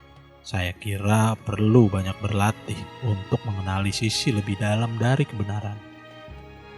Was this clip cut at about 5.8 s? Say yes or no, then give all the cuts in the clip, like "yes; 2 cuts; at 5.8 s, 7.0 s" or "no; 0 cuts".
yes; 1 cut; at 5.8 s